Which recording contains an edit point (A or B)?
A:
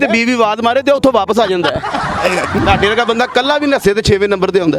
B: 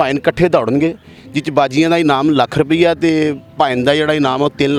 A